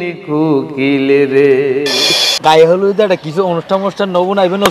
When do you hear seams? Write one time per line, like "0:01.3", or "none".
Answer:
0:02.3